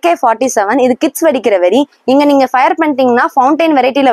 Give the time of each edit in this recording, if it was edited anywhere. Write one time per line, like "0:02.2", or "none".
none

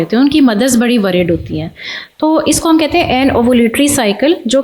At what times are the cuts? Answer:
none

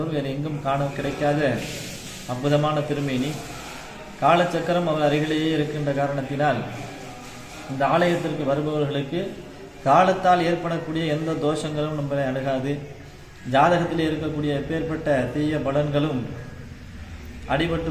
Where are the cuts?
none

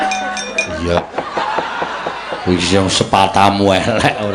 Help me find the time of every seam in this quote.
0:01.0

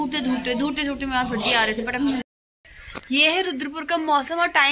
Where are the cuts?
0:02.2

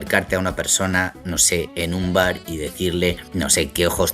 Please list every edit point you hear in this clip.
0:03.2

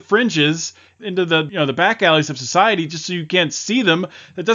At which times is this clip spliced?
0:01.2

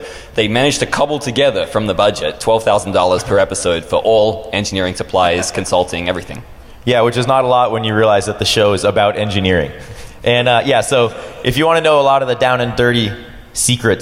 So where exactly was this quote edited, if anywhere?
none

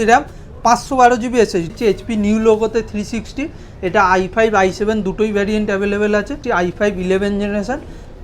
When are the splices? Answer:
0:01.7
0:06.4

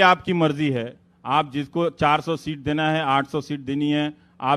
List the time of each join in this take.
none

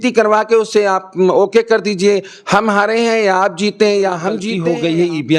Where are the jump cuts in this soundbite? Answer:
0:04.5

